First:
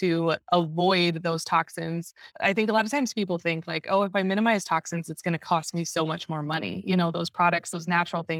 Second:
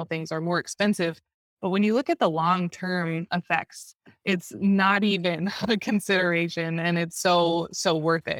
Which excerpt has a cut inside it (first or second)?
first